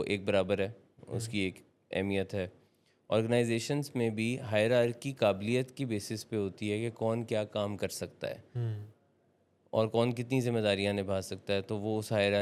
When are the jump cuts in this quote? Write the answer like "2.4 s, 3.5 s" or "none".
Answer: none